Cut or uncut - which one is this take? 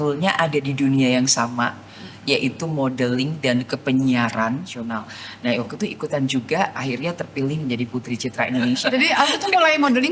cut